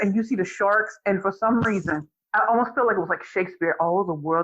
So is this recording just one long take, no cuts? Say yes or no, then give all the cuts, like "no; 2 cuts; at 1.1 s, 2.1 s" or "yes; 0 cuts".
no; 1 cut; at 2.2 s